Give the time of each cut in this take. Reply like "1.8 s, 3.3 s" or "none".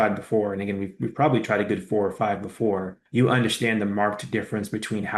none